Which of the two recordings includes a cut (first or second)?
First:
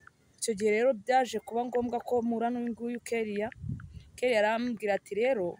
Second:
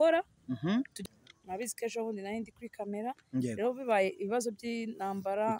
second